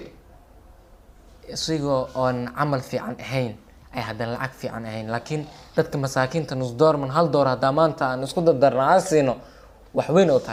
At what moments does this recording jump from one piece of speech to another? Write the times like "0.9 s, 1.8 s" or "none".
none

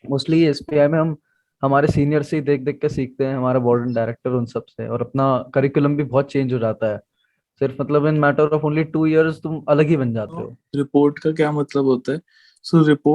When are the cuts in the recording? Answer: 10.6 s

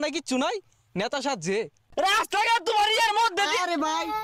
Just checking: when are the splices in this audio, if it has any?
1.8 s

